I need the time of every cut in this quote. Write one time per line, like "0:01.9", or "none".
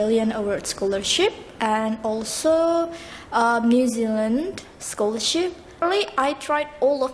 0:05.8

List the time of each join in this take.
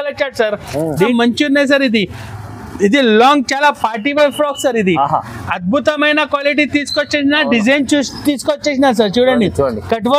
0:01.1

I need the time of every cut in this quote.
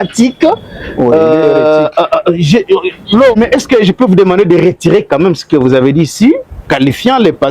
0:03.3

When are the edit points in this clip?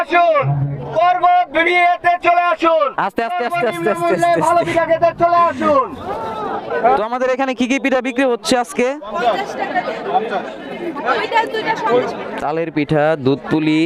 none

